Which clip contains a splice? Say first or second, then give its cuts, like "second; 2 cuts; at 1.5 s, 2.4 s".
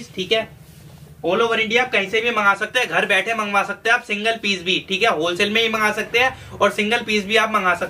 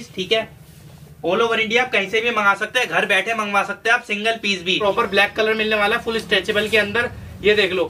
second; 1 cut; at 4.8 s